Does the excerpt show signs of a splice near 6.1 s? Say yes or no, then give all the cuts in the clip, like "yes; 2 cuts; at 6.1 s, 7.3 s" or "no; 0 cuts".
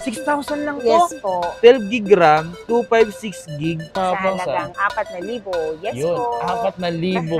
no; 2 cuts; at 1.5 s, 3.9 s